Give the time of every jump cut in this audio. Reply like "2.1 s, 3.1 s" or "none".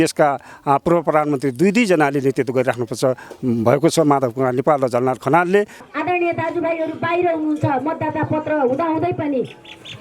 5.8 s